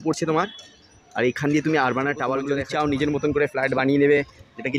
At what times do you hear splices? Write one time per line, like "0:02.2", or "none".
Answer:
0:02.6

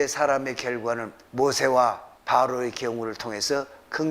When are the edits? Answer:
0:01.2
0:02.1

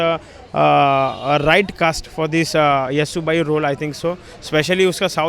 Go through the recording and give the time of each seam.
none

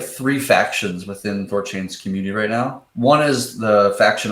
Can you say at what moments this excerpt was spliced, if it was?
0:02.8

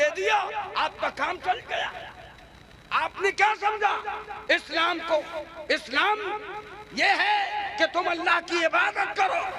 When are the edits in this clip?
none

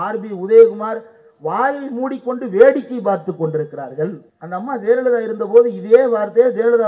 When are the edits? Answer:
0:04.3

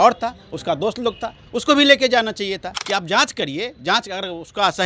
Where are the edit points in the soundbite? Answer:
0:02.7

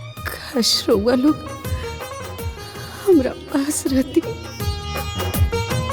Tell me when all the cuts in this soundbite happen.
none

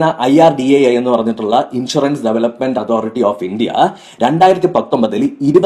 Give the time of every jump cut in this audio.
none

